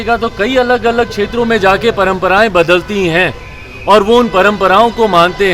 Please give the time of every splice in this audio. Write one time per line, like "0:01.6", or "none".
none

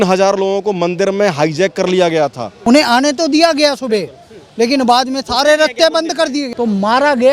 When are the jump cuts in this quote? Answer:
0:02.5
0:06.5

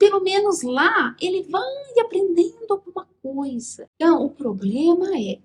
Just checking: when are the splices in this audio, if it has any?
0:03.8

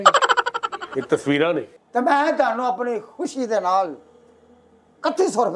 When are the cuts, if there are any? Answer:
0:01.7

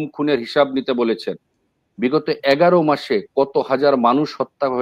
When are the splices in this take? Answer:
none

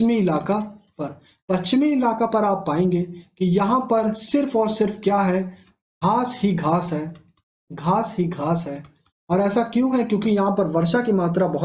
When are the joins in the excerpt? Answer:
none

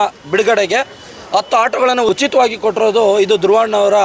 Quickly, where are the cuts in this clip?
0:02.1

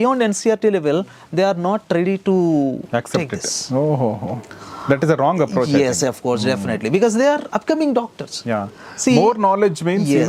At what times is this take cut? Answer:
none

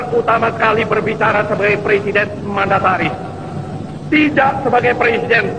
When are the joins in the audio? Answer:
none

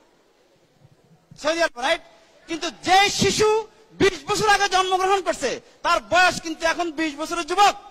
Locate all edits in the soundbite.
none

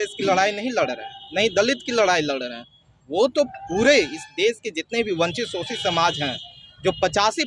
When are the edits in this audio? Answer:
none

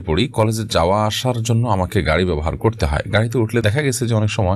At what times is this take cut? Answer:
0:03.6

